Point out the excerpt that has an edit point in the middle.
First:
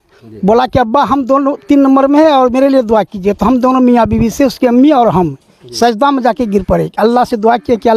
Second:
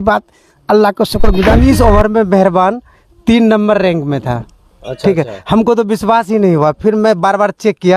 second; 1 cut; at 1.6 s

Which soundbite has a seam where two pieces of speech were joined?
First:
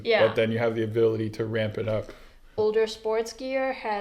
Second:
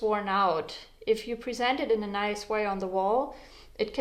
first; 1 cut; at 2.6 s

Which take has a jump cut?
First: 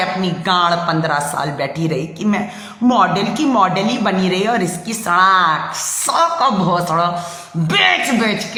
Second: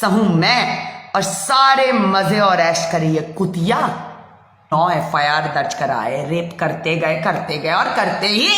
second; 1 cut; at 4.7 s

